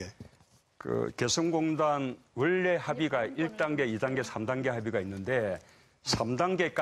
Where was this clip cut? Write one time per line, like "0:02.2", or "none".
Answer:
0:01.5